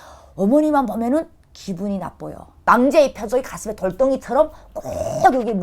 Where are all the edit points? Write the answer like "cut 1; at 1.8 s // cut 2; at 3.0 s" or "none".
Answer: cut 1; at 2.5 s